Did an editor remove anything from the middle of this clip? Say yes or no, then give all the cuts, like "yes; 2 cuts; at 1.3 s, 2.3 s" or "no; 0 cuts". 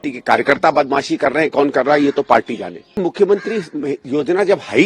yes; 1 cut; at 2.9 s